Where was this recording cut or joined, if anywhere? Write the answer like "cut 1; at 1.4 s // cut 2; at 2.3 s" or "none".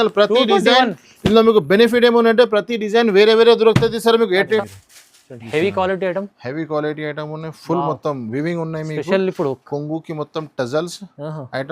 cut 1; at 4.6 s